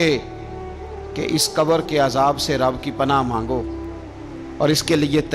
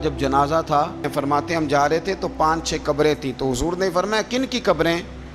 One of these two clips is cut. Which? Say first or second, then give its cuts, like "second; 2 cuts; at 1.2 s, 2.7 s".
second; 1 cut; at 1.1 s